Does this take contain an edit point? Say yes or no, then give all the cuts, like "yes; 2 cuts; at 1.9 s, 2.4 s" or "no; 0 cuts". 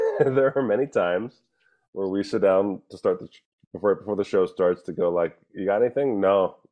no; 0 cuts